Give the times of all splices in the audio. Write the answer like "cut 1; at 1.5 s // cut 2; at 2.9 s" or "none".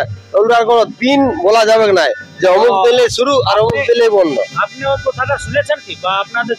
none